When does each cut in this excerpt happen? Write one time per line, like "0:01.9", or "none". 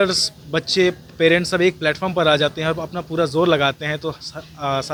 none